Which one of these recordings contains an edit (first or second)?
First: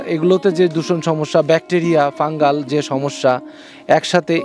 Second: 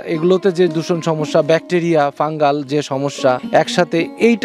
second